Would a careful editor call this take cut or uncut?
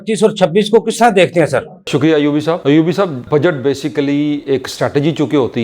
uncut